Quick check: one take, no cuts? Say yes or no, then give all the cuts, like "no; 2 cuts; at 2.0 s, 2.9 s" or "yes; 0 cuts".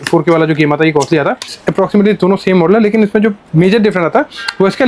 no; 1 cut; at 1.5 s